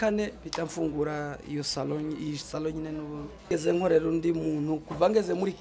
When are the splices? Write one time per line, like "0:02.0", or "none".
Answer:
0:03.5